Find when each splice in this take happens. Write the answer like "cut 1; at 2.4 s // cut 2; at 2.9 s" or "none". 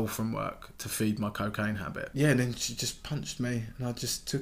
cut 1; at 2.1 s